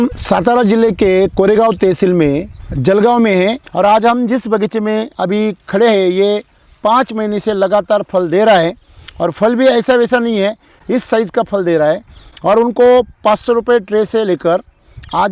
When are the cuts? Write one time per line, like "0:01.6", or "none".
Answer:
0:03.6